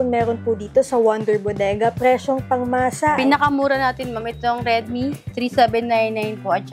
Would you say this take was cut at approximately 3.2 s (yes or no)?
yes